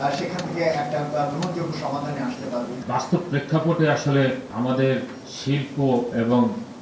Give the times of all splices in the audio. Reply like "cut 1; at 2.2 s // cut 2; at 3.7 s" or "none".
cut 1; at 2.8 s // cut 2; at 4.5 s